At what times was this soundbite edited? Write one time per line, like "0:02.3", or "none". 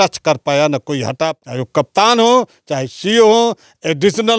0:01.3